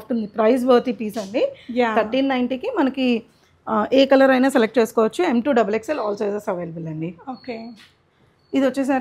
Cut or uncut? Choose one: uncut